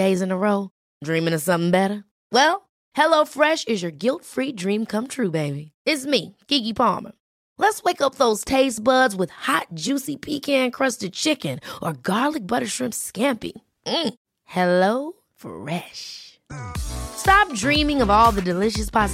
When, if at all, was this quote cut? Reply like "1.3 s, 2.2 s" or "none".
none